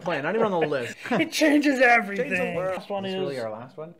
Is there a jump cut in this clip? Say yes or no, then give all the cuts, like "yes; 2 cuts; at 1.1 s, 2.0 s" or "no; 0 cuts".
yes; 2 cuts; at 0.9 s, 2.8 s